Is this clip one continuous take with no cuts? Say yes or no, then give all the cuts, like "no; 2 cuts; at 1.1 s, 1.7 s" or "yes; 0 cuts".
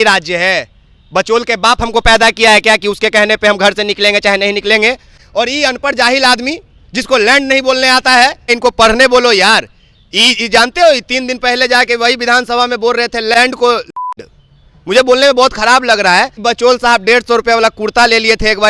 no; 4 cuts; at 5.2 s, 8.5 s, 13.3 s, 16.4 s